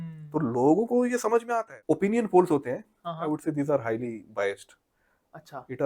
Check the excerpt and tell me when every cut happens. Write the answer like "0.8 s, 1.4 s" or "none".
1.8 s